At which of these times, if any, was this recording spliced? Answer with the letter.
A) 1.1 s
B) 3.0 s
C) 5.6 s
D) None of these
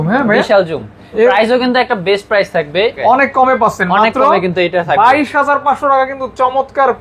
B